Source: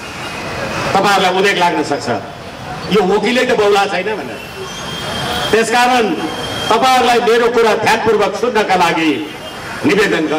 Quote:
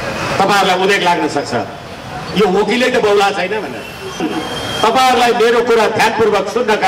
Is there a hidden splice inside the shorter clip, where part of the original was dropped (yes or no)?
yes